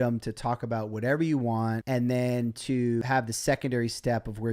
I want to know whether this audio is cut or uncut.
cut